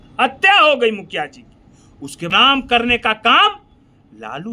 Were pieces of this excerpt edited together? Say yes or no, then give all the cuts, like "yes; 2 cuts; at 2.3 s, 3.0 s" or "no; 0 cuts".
yes; 1 cut; at 2.3 s